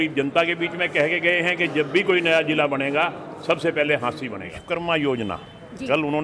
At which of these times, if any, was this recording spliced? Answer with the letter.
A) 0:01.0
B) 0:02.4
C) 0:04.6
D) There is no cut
C